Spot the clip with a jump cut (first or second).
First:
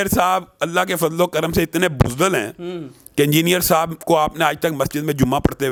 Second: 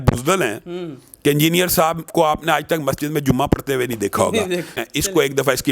second